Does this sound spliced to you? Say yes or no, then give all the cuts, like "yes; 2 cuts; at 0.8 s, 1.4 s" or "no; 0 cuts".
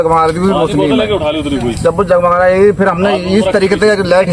no; 0 cuts